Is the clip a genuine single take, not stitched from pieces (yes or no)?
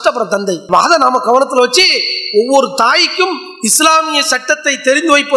yes